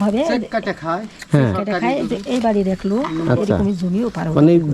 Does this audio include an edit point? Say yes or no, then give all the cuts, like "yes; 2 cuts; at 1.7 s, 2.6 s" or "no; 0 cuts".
no; 0 cuts